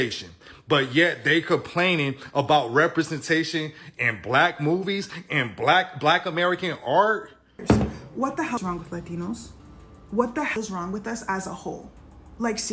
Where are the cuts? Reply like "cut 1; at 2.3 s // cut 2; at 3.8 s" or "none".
cut 1; at 7.5 s // cut 2; at 8.6 s // cut 3; at 10.5 s